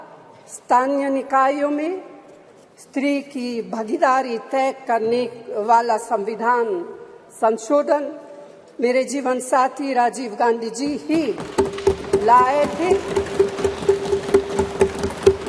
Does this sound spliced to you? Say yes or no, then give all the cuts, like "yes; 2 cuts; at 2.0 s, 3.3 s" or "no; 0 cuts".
no; 0 cuts